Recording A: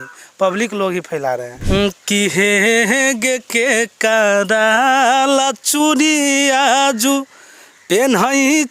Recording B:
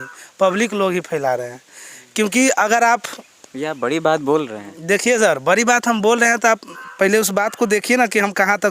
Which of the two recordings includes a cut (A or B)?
A